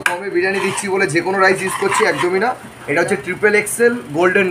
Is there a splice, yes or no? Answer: yes